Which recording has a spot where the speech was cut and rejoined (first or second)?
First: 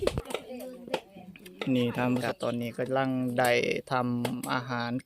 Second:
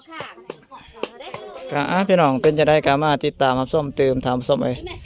first